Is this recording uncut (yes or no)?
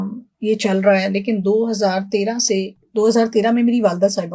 yes